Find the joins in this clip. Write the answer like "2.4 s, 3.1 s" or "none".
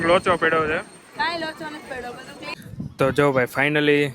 2.5 s